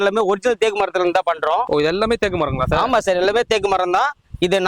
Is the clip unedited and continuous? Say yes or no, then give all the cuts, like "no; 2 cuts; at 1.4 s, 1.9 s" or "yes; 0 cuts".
no; 1 cut; at 1.7 s